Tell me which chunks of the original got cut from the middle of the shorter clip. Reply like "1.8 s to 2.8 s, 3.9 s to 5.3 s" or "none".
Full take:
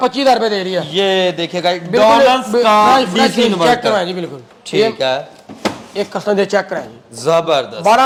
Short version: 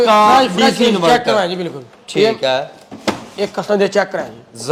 none